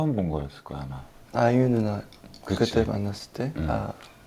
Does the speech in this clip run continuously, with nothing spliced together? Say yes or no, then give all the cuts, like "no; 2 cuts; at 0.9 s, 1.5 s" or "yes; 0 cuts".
yes; 0 cuts